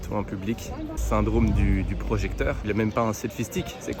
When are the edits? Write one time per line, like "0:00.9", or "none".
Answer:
0:01.0
0:02.6

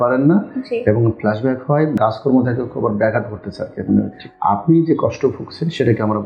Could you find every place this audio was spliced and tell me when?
0:01.9
0:04.2

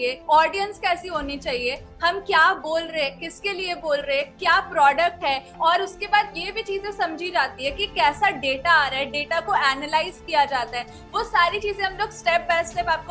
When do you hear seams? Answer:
none

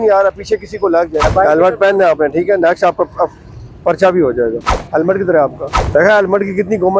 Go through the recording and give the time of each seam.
0:01.3
0:04.7
0:05.7

